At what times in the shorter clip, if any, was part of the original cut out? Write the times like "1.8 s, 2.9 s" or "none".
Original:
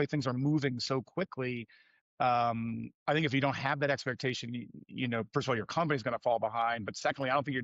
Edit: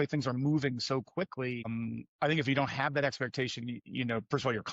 1.7 s, 3.8 s